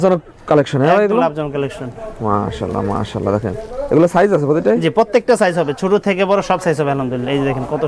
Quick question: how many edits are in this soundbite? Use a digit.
0